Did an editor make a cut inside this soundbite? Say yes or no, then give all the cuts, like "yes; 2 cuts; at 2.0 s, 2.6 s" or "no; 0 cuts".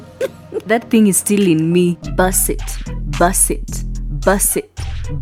no; 0 cuts